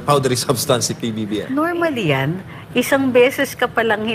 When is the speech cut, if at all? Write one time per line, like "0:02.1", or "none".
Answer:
0:01.2